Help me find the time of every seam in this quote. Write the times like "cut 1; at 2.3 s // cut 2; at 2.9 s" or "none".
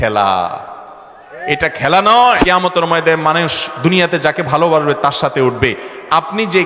cut 1; at 2.4 s